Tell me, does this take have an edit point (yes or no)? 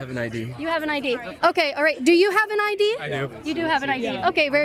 no